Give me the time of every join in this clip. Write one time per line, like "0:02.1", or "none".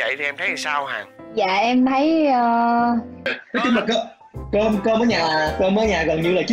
0:03.4

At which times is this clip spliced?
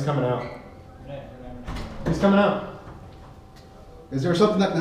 none

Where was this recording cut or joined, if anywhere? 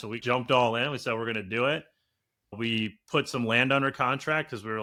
none

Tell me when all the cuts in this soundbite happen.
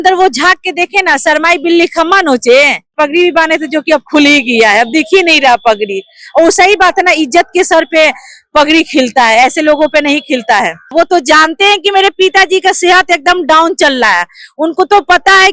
0:02.9
0:10.9

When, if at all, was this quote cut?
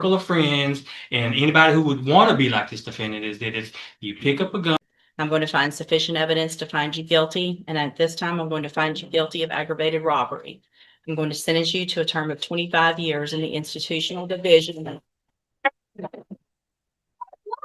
0:04.8

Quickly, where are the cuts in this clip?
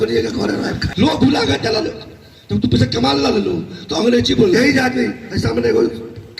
0:00.9
0:04.5

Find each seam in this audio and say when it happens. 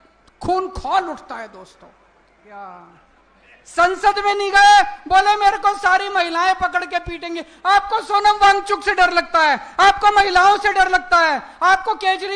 0:02.4

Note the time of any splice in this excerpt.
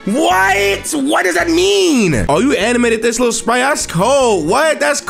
0:02.2

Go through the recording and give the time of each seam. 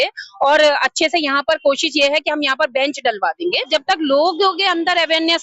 0:03.7

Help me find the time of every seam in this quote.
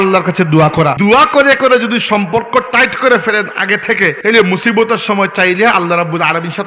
0:00.9
0:04.2

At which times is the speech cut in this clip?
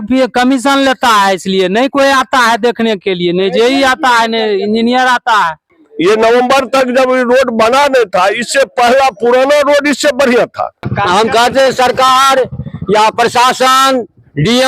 0:05.7
0:10.9

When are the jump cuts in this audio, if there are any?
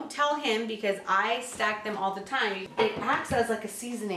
0:02.6

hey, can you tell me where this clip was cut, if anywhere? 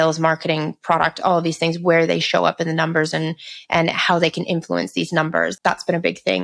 0:05.5

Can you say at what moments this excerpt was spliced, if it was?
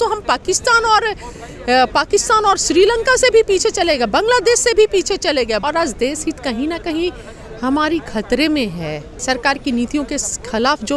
0:05.6
0:09.2

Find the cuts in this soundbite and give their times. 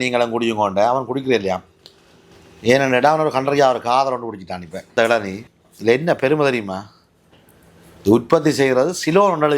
0:04.9

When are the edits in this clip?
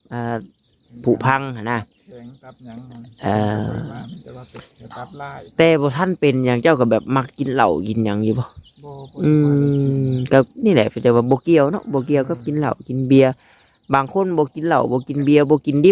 none

